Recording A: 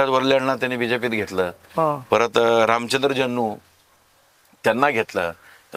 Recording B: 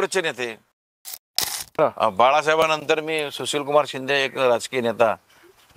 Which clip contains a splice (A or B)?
B